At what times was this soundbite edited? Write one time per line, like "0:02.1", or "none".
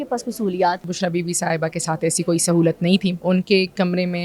0:00.9
0:03.2